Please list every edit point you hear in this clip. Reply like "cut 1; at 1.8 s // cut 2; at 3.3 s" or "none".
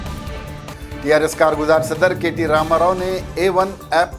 cut 1; at 1.2 s